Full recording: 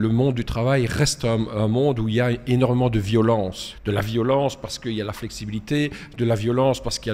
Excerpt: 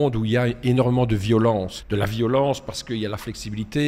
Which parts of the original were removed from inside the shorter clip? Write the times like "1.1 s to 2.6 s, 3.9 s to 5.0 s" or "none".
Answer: 3.6 s to 3.7 s